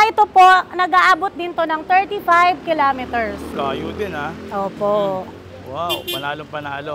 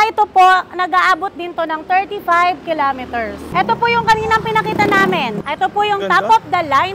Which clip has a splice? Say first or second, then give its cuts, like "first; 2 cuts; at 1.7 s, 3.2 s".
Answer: second; 2 cuts; at 3.5 s, 5.4 s